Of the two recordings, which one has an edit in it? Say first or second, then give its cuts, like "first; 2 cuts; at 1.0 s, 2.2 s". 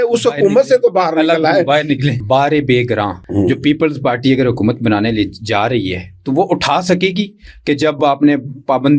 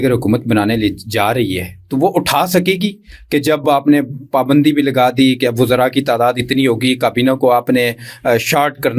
first; 2 cuts; at 2.2 s, 3.2 s